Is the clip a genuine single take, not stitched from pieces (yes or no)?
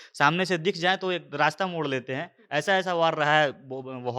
yes